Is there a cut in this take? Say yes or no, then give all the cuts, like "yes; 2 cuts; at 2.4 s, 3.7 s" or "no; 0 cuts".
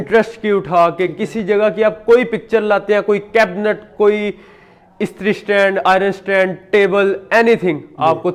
no; 0 cuts